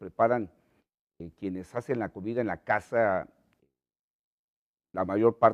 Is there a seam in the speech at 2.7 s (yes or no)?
yes